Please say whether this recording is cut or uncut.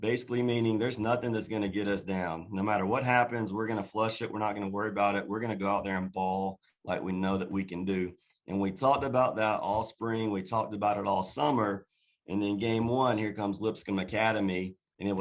uncut